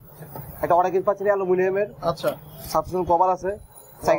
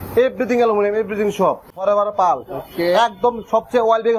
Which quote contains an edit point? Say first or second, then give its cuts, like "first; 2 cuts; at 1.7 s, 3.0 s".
second; 1 cut; at 1.7 s